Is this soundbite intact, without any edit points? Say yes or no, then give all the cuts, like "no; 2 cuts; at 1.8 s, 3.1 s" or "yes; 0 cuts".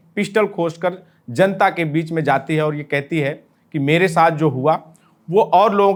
yes; 0 cuts